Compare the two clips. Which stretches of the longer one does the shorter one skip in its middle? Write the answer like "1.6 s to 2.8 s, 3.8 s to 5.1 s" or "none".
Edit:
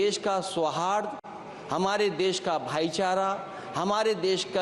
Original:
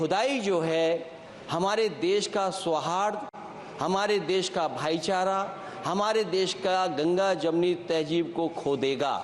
none